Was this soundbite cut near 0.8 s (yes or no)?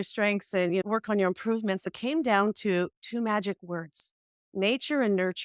yes